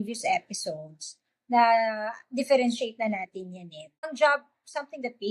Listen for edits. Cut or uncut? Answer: cut